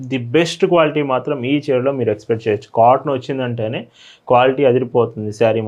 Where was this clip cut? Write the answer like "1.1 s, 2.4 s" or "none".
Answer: none